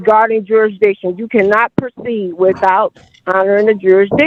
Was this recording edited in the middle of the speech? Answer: no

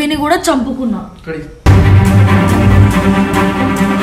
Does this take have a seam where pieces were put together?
no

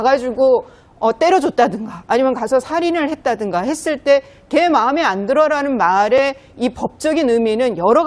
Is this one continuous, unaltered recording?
yes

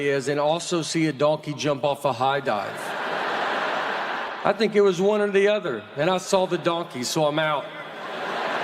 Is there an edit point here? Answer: yes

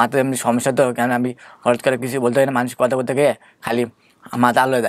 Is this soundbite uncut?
yes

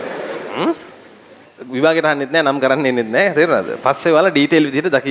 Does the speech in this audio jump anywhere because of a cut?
yes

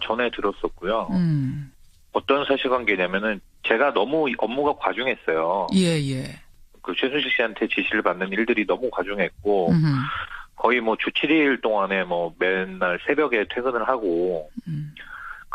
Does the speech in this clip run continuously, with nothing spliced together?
no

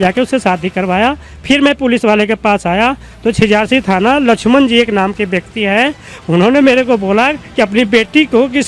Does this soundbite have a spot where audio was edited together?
no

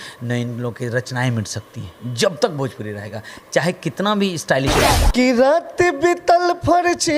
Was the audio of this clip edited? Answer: yes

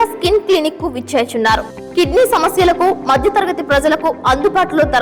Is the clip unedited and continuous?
yes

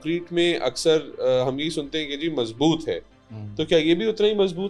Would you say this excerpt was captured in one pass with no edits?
yes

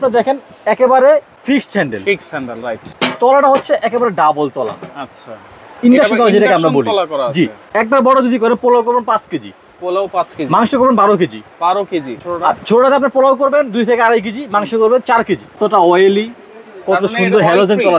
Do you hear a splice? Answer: yes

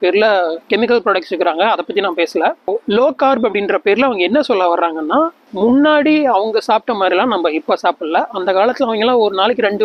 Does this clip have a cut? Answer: yes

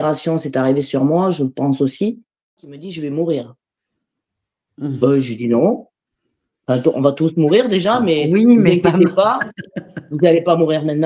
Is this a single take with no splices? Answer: no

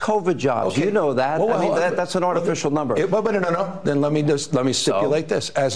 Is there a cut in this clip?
no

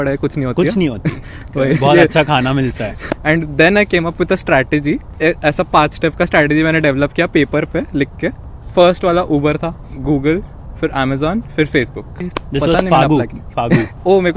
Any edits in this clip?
yes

